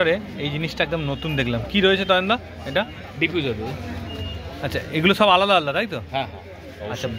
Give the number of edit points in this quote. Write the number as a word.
zero